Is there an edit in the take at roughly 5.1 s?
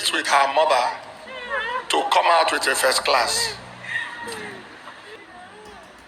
yes; 1 cut; at 5.1 s

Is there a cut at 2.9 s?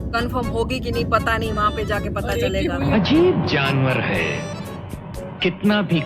yes; 1 cut; at 2.9 s

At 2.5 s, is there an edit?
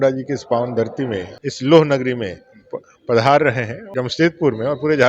no; 2 cuts; at 1.3 s, 3.8 s

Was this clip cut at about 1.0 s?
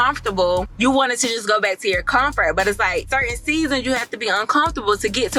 no; 0 cuts

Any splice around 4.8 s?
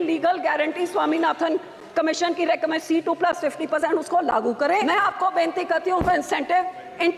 yes; 1 cut; at 4.8 s

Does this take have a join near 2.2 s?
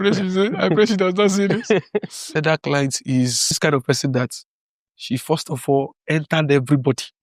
yes; 2 cuts; at 2.2 s, 3.6 s

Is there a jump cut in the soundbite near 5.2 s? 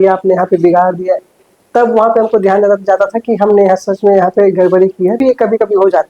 yes; 1 cut; at 5.2 s

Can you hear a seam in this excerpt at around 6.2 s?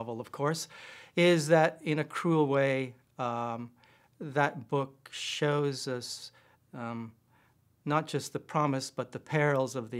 no; 0 cuts

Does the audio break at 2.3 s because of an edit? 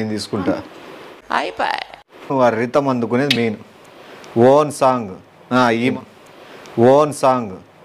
yes; 1 cut; at 2.3 s

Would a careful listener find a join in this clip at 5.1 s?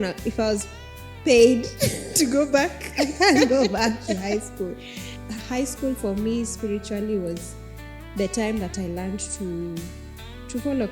yes; 1 cut; at 5.1 s

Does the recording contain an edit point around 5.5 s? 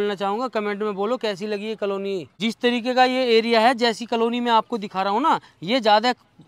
no; 0 cuts

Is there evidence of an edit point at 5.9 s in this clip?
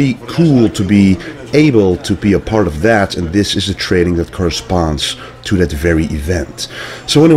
no; 1 cut; at 4.3 s

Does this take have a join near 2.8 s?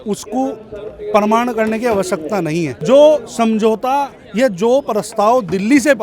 yes; 1 cut; at 2.8 s

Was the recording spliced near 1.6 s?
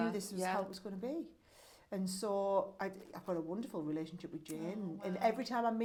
no; 0 cuts

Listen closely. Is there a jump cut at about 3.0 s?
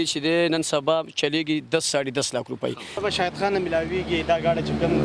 yes; 1 cut; at 3.0 s

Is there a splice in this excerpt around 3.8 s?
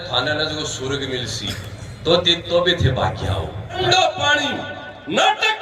yes; 1 cut; at 3.8 s

